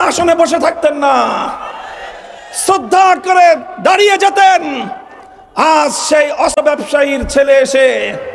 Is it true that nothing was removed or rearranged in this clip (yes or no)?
no